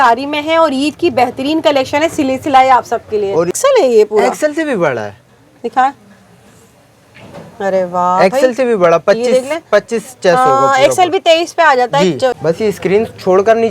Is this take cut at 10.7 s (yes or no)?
no